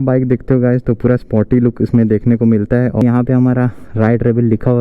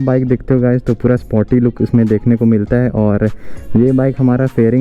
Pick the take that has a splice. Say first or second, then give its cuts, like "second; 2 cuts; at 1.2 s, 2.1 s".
first; 1 cut; at 3.0 s